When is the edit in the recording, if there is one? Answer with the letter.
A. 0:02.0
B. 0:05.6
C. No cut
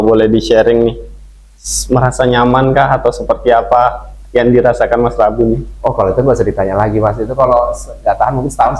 C